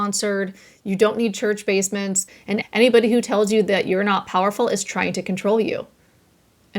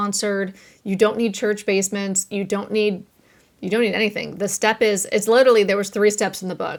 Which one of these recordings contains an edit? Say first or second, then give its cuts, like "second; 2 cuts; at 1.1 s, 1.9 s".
first; 1 cut; at 2.5 s